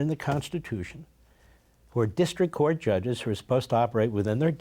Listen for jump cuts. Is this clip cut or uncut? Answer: uncut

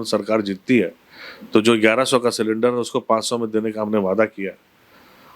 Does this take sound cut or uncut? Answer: uncut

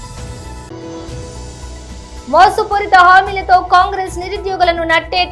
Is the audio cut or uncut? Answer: cut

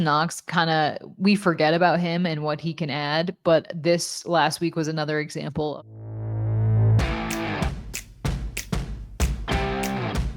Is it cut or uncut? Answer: cut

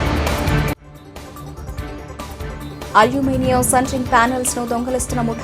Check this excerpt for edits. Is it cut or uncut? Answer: cut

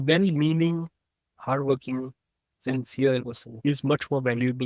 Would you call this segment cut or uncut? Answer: uncut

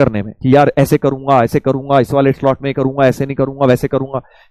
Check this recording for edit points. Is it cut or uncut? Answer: uncut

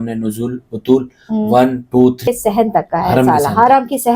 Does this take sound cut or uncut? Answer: cut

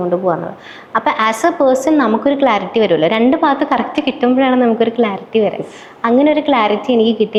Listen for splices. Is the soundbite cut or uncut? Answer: uncut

